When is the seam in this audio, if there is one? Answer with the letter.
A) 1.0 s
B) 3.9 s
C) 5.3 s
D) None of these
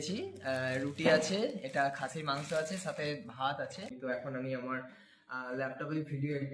B